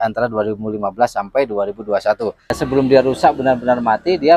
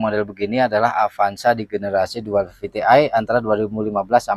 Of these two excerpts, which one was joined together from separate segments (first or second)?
first